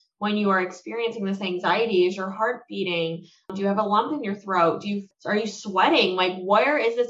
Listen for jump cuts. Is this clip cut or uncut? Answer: cut